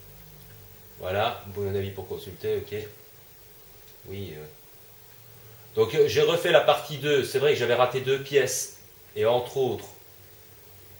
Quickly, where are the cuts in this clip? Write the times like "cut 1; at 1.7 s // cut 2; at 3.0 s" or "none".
none